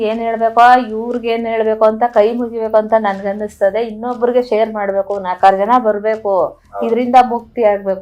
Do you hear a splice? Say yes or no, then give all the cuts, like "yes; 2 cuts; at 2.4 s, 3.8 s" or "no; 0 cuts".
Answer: no; 0 cuts